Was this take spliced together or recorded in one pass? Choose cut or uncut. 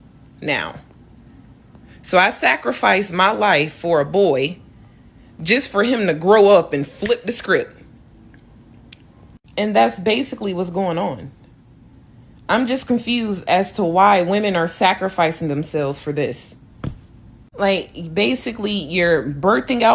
uncut